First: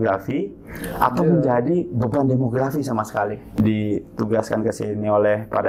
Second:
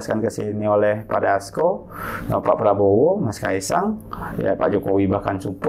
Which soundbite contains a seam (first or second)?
first